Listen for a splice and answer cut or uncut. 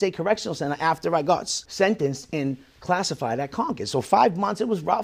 cut